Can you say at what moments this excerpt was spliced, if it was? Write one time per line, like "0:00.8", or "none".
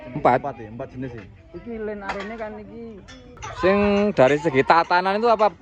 0:03.4